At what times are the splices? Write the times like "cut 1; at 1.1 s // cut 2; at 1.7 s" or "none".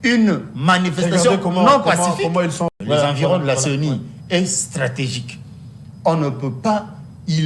cut 1; at 2.7 s